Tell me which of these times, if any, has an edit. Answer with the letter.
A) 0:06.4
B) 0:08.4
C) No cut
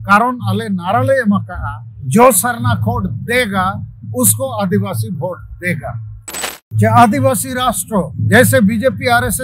A